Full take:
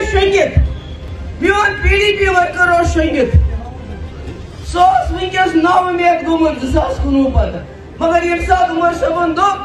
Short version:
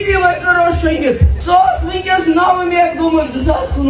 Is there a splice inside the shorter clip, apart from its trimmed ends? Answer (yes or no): yes